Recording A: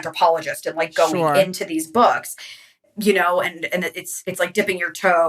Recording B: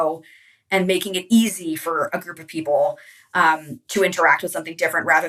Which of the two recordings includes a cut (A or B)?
A